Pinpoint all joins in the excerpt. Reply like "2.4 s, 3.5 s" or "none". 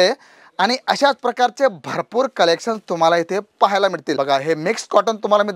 4.1 s

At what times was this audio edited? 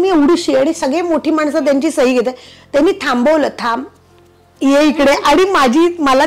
none

